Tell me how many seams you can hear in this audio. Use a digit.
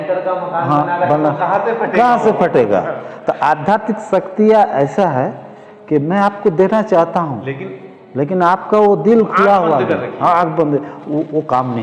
0